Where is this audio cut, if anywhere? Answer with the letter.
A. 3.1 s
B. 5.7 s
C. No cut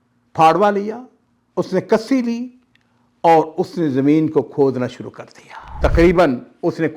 B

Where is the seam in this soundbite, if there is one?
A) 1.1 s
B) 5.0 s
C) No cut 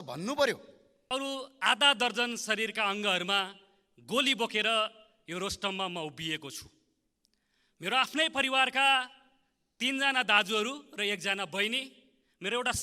A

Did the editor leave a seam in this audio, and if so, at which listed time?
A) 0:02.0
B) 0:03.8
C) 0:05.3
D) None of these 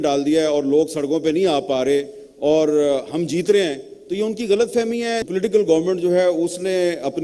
C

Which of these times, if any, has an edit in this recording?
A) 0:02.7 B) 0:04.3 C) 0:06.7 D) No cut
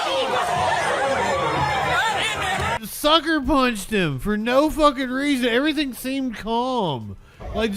A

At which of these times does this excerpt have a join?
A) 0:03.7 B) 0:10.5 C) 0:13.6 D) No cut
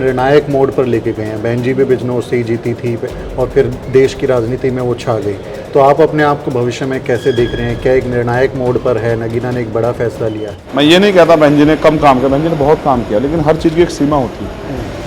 B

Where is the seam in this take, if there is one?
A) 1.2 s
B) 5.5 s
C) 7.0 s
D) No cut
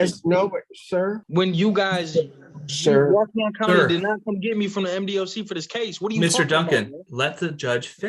A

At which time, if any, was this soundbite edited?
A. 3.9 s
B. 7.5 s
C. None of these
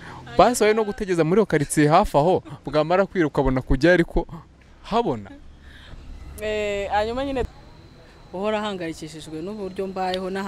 B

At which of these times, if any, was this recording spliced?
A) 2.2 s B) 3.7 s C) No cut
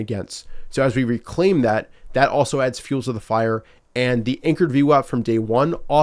C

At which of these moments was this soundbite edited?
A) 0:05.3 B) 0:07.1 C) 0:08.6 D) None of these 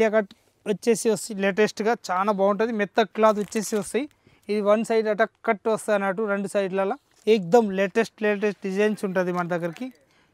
B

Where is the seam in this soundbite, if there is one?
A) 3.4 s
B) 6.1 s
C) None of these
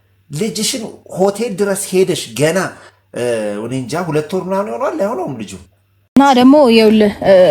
B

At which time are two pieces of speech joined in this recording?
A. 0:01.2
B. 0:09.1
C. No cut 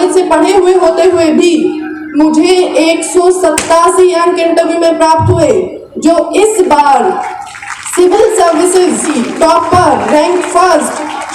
B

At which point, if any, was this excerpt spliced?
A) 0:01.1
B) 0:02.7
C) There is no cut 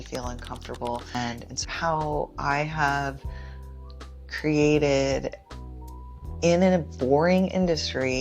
A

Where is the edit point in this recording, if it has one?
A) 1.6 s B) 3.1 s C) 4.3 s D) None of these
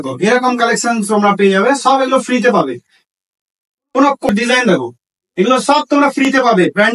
C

